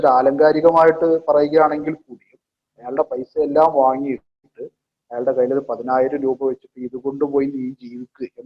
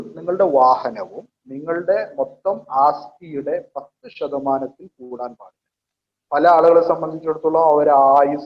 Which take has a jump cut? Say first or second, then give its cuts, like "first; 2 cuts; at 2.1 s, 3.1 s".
second; 1 cut; at 6.1 s